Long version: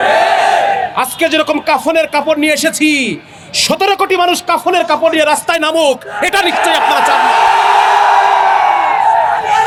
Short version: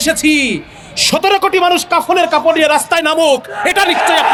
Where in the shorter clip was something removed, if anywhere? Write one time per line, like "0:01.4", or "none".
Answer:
none